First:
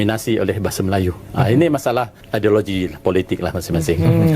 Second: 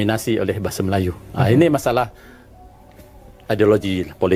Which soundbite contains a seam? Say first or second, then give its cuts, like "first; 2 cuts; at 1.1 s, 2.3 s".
first; 1 cut; at 2.2 s